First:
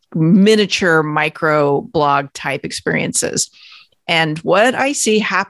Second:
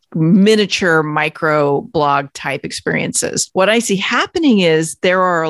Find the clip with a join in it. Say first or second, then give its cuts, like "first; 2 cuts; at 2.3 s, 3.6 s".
second; 1 cut; at 3.4 s